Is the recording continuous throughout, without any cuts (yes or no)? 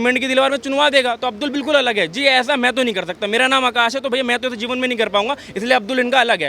yes